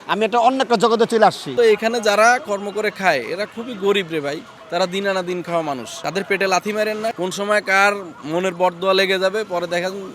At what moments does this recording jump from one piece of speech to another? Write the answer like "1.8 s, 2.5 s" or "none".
1.5 s, 4.5 s, 5.9 s, 7.1 s